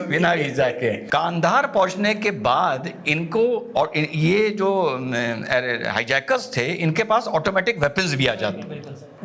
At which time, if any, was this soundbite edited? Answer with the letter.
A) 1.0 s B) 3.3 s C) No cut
A